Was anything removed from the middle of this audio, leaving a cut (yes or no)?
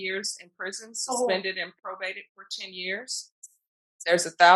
no